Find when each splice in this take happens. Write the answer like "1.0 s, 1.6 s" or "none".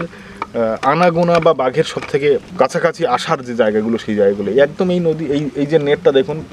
none